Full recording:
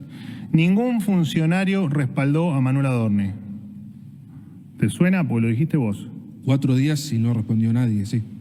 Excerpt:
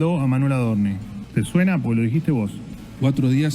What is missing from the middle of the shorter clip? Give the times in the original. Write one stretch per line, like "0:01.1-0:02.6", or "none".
0:03.5-0:04.6